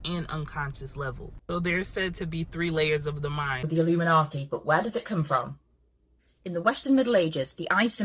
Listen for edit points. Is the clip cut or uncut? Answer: cut